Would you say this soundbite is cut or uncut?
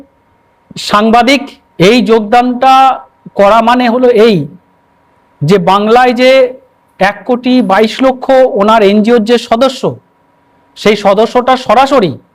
cut